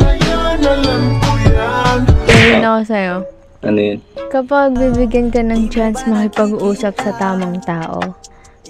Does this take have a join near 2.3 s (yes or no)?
yes